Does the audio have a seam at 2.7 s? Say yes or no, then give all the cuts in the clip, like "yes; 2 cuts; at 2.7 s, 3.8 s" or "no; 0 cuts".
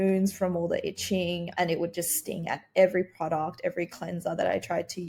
no; 0 cuts